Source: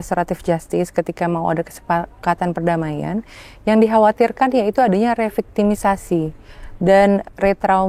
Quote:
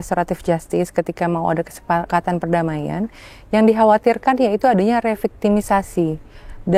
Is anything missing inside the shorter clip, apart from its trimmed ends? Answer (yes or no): yes